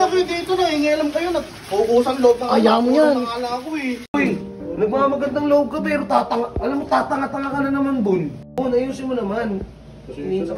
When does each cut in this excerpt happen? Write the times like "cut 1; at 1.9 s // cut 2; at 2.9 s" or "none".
cut 1; at 4.1 s // cut 2; at 8.4 s